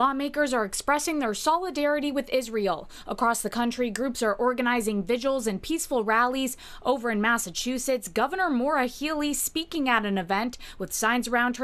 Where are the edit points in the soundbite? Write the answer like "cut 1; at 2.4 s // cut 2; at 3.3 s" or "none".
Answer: none